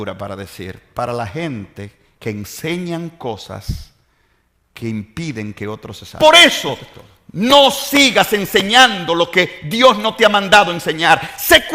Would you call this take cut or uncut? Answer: cut